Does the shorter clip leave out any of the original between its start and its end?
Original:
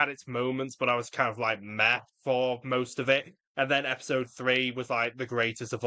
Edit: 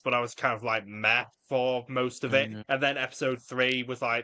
yes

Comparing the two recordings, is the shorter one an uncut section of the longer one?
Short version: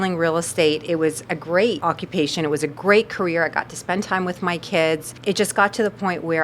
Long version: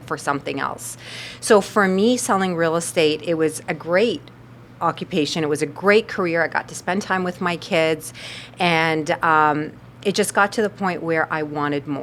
no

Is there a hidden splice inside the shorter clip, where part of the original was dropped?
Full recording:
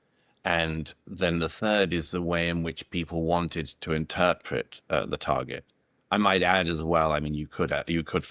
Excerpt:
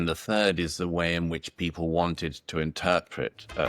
no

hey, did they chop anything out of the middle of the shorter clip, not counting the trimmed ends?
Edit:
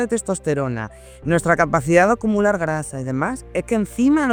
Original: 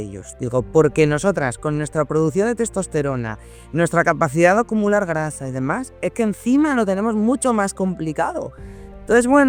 no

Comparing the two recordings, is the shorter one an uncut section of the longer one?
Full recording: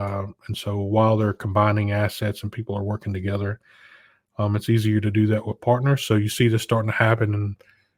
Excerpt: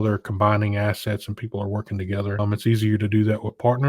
no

